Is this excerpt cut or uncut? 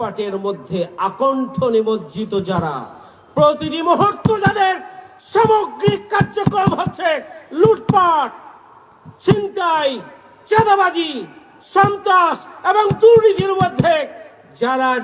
uncut